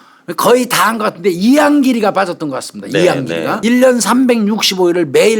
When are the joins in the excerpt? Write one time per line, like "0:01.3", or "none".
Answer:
0:03.6